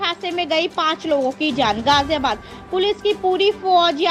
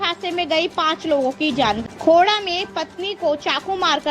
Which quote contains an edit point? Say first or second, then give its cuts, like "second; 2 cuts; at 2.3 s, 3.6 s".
second; 1 cut; at 1.8 s